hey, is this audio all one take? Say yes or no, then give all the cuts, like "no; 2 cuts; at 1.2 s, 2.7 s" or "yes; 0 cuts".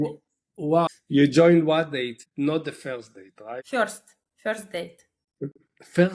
no; 1 cut; at 0.9 s